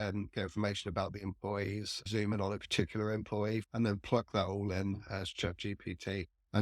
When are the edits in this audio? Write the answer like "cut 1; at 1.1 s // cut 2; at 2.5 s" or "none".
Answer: cut 1; at 2.1 s // cut 2; at 3.6 s